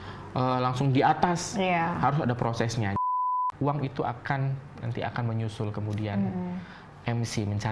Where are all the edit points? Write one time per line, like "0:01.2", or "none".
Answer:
0:03.0